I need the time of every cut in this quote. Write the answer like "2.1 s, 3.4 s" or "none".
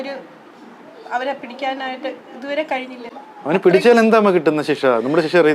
none